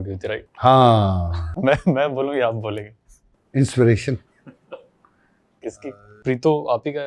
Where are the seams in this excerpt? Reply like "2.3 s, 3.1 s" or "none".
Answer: 6.1 s